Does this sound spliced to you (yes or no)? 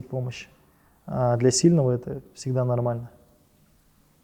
no